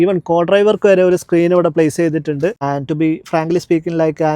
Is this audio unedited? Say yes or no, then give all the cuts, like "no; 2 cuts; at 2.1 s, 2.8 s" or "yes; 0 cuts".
no; 1 cut; at 2.6 s